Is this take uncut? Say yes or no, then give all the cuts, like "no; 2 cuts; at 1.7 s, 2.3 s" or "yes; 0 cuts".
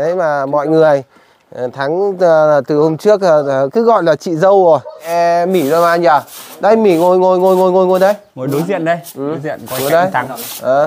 no; 1 cut; at 5.1 s